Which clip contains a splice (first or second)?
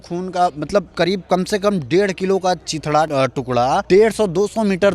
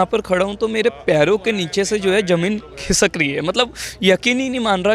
first